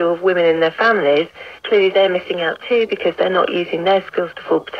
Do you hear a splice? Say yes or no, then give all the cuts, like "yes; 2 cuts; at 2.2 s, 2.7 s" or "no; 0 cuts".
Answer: no; 0 cuts